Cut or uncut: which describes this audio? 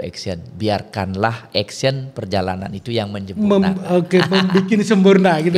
uncut